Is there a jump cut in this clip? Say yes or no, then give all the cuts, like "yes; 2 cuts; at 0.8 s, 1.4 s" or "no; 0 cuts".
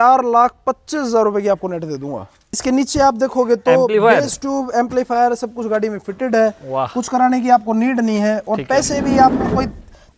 yes; 1 cut; at 2.5 s